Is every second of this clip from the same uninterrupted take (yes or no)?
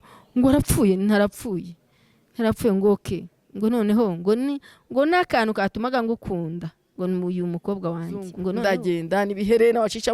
no